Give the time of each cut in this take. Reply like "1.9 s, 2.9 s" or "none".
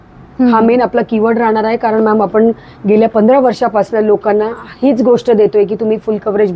none